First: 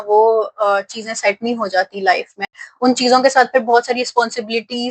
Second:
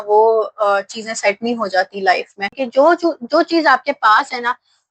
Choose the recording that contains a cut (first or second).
second